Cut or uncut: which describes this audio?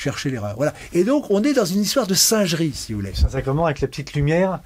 uncut